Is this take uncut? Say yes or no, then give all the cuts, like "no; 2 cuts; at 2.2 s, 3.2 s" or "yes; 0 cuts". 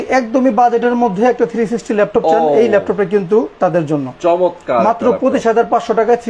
yes; 0 cuts